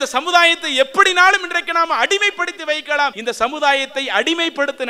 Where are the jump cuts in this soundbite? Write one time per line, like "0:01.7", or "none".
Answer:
0:03.2